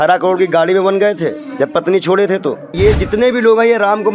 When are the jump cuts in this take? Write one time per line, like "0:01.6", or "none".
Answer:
0:02.7